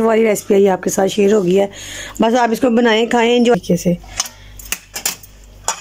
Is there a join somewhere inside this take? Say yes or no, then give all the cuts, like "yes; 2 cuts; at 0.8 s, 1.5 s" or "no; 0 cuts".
yes; 1 cut; at 3.6 s